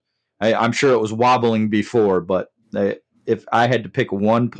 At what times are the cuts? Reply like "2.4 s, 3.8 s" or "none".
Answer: none